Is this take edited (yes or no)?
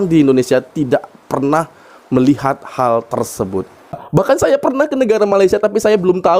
yes